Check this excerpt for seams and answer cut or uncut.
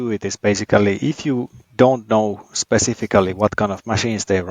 cut